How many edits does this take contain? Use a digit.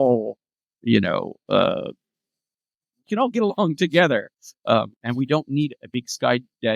0